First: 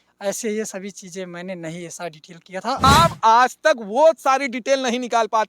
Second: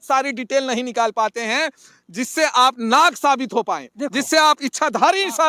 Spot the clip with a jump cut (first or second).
first